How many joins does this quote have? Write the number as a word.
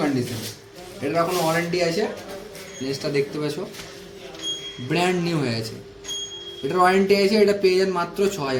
zero